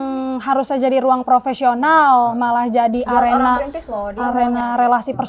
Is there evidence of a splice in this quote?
no; 0 cuts

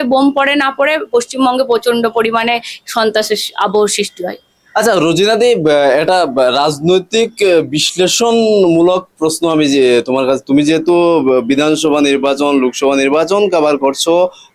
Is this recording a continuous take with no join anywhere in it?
yes; 0 cuts

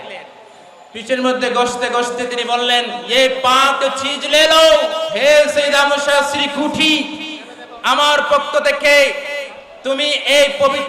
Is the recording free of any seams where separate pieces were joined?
no; 1 cut; at 5.1 s

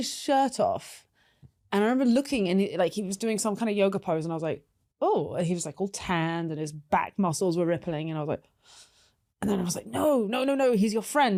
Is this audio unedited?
yes; 0 cuts

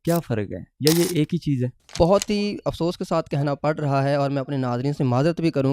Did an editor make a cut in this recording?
yes; 1 cut; at 1.8 s

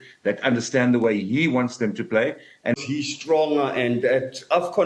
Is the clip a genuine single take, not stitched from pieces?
no; 1 cut; at 2.7 s

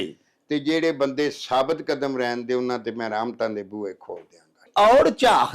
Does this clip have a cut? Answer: yes; 1 cut; at 4.6 s

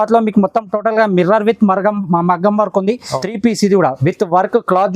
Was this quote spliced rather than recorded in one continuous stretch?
yes; 1 cut; at 3.1 s

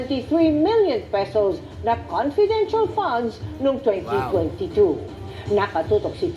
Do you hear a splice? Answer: yes; 1 cut; at 1.7 s

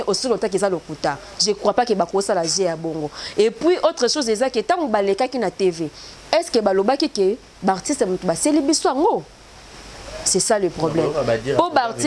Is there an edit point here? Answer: no; 0 cuts

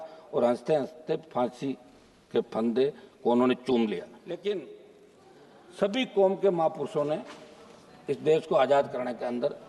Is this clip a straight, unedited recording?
no; 1 cut; at 4.2 s

